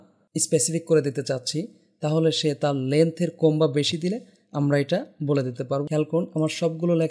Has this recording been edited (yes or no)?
yes